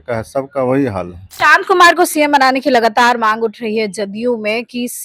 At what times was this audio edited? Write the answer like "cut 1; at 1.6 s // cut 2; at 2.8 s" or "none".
cut 1; at 1.2 s